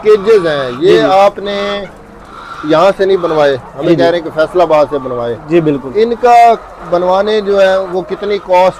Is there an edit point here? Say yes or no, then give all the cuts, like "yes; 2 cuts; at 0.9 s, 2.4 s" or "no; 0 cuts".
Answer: no; 0 cuts